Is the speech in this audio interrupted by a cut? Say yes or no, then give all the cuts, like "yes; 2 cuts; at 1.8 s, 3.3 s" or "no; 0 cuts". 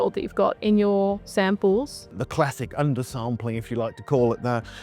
yes; 1 cut; at 2.0 s